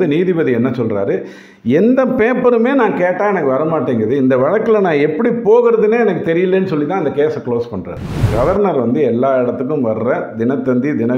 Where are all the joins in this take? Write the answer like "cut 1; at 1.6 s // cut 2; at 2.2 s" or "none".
cut 1; at 8.2 s